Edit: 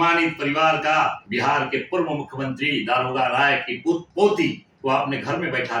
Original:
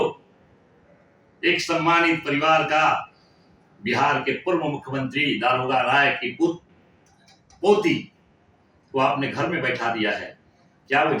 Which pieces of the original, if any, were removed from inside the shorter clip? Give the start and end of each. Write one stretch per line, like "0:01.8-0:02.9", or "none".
0:03.1-0:03.8
0:06.6-0:07.5
0:08.1-0:08.8